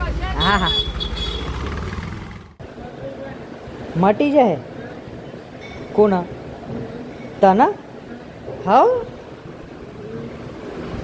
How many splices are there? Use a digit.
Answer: 1